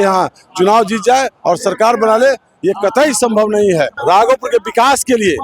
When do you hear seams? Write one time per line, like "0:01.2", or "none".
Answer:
0:03.9